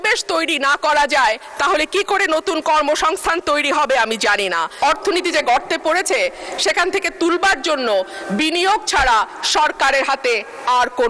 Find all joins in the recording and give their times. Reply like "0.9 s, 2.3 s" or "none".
4.8 s

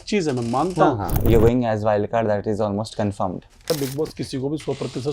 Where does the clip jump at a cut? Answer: 1.1 s, 3.7 s

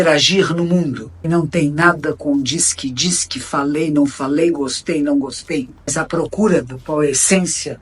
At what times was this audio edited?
1.1 s, 5.9 s

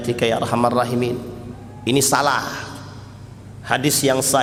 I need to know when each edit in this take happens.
none

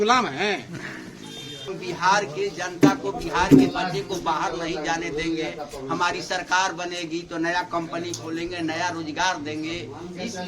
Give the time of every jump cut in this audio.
1.7 s

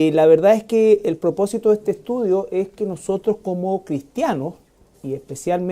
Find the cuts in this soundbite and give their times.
none

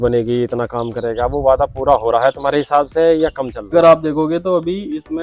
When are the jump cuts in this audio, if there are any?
3.7 s

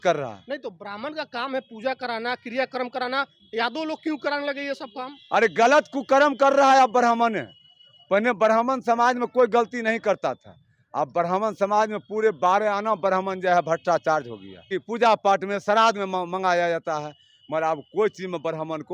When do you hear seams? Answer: 14.7 s

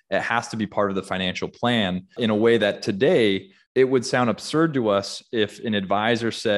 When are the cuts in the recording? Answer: 2.1 s, 3.5 s

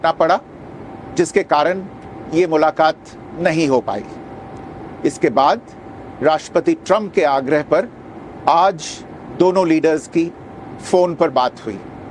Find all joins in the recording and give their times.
none

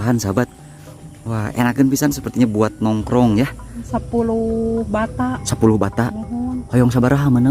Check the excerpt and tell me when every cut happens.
3.9 s

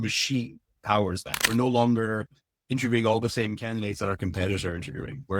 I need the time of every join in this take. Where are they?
1.3 s

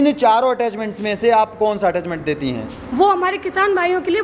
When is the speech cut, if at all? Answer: 2.8 s

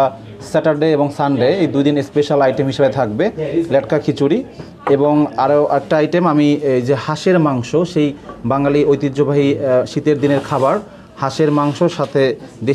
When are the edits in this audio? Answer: none

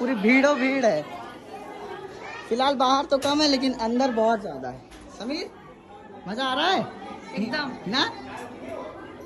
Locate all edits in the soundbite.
none

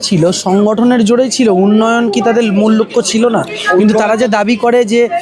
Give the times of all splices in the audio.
none

